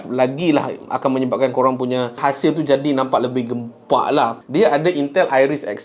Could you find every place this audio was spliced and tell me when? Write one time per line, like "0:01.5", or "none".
0:04.4